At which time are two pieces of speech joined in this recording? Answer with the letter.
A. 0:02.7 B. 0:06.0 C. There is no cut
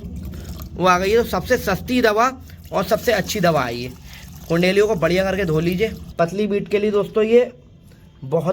B